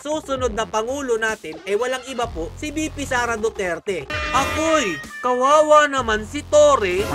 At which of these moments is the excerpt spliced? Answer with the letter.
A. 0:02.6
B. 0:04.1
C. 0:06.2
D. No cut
B